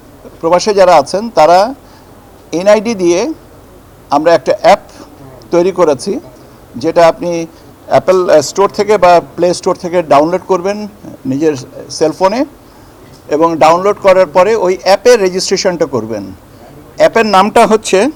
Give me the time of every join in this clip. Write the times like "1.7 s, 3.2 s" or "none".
none